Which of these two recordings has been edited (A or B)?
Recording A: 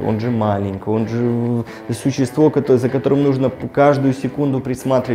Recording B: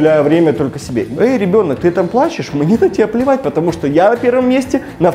B